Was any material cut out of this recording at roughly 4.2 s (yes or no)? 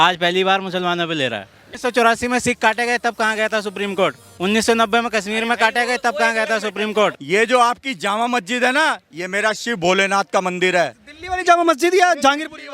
no